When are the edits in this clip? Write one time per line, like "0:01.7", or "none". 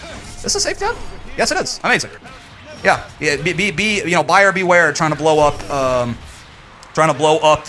none